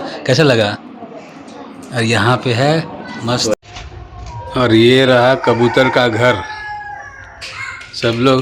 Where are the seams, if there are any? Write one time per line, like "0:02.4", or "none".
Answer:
0:03.5